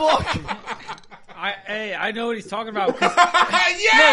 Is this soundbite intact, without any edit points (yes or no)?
yes